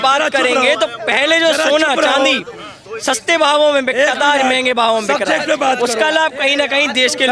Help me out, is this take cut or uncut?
uncut